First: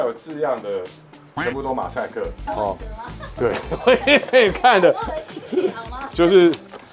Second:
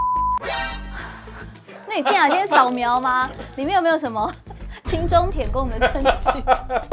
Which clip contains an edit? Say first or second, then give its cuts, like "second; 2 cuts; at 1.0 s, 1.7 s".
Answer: first; 1 cut; at 2.4 s